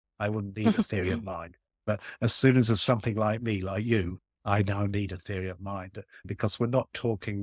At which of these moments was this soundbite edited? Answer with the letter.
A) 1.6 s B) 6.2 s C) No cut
B